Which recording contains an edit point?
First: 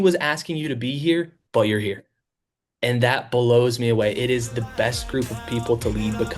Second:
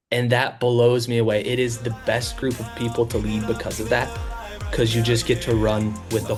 first; 1 cut; at 1.4 s

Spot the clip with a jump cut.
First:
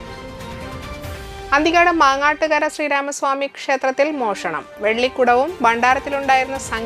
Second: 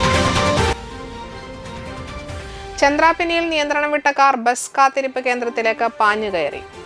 first; 1 cut; at 0.9 s

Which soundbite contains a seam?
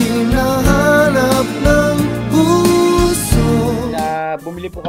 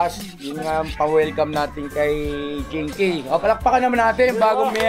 first; 1 cut; at 3.9 s

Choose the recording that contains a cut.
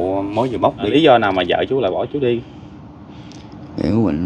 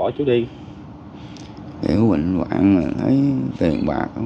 first; 1 cut; at 0.9 s

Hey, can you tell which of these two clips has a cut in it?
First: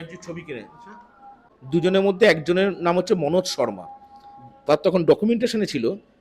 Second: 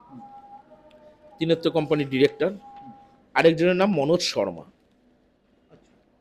first; 1 cut; at 1.5 s

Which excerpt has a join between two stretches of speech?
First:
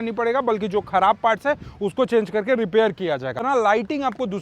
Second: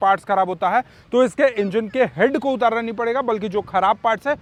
first; 1 cut; at 3.4 s

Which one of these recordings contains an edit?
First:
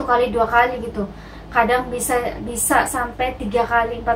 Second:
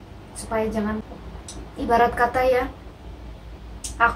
second; 1 cut; at 1.2 s

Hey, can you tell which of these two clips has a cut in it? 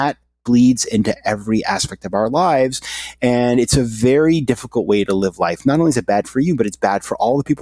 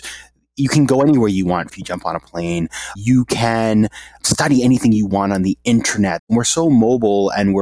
second; 4 cuts; at 1.8 s, 3.0 s, 4.2 s, 6.2 s

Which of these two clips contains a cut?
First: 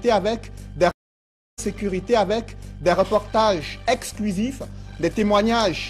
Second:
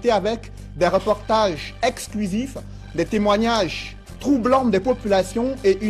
second; 1 cut; at 0.9 s

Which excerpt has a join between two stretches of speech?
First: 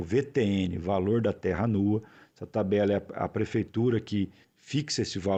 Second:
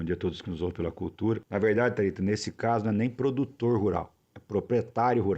second; 1 cut; at 1.4 s

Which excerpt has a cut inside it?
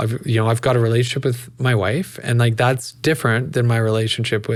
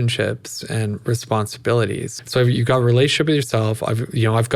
second; 1 cut; at 2.1 s

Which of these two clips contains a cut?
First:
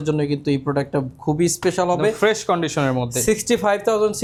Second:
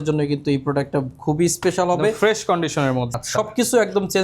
second; 1 cut; at 3.2 s

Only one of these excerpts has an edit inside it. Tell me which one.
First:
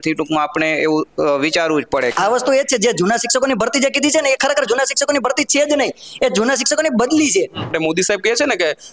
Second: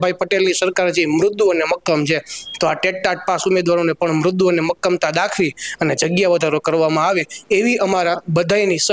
first; 2 cuts; at 2.1 s, 7.7 s

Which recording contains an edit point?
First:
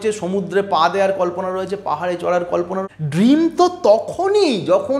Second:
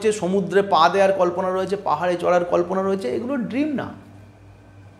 first; 1 cut; at 2.8 s

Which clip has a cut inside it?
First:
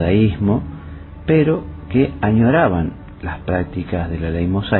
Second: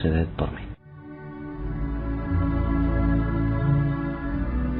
second; 1 cut; at 2.4 s

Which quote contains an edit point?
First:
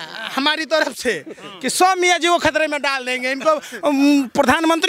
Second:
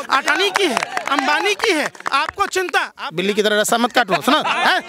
second; 1 cut; at 3.0 s

